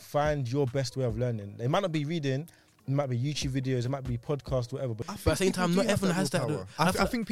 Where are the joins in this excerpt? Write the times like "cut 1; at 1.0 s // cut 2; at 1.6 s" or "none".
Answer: cut 1; at 5.1 s